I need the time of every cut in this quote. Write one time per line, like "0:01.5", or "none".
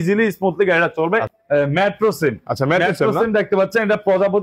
0:01.3